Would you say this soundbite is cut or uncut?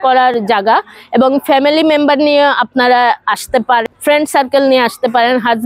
cut